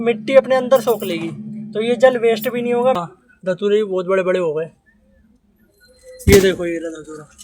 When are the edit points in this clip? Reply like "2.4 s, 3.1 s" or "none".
3.0 s